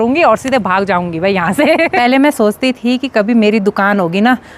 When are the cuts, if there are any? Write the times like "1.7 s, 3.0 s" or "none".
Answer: 1.9 s